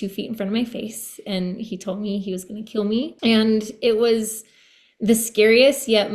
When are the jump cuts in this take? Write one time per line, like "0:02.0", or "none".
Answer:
0:03.1